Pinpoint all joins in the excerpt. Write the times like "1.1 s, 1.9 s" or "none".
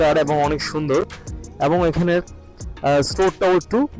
none

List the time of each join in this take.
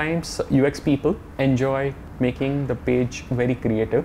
1.3 s, 2.0 s

